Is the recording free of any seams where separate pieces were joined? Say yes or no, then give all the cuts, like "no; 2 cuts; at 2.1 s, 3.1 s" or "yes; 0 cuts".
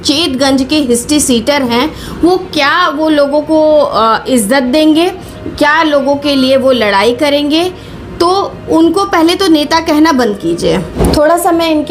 yes; 0 cuts